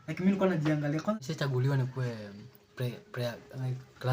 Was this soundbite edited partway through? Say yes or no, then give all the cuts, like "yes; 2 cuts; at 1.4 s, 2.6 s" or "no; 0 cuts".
yes; 1 cut; at 1.2 s